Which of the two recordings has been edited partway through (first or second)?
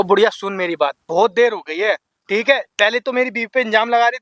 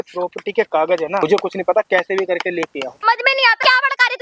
second